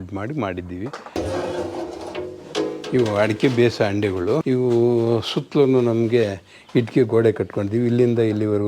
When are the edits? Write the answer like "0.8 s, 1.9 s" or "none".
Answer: 1.2 s, 4.4 s